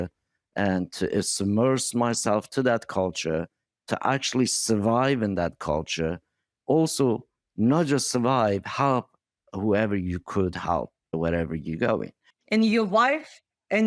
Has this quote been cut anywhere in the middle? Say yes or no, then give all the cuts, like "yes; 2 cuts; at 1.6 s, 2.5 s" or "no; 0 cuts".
no; 0 cuts